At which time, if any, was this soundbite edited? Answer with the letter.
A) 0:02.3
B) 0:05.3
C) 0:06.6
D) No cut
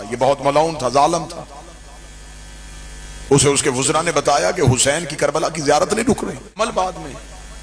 C